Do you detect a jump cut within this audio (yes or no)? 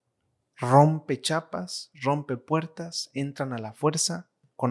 no